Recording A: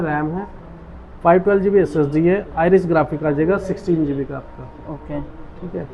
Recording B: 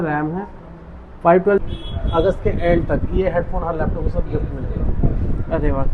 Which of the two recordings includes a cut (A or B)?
B